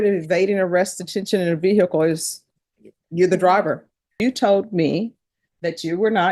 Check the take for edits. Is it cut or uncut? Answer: cut